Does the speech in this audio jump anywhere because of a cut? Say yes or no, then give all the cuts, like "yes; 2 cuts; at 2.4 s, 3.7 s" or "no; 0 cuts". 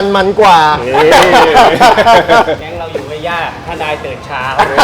yes; 1 cut; at 2.6 s